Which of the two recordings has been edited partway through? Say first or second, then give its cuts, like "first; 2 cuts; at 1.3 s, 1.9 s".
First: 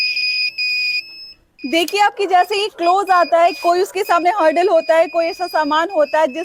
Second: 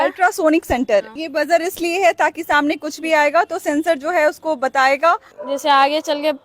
second; 2 cuts; at 1.2 s, 5.3 s